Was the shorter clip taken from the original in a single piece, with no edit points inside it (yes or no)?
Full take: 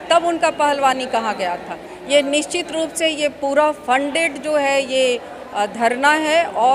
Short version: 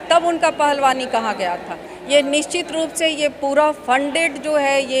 yes